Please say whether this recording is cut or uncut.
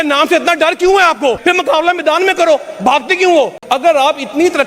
cut